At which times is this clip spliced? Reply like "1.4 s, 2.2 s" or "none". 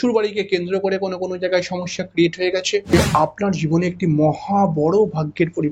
3.1 s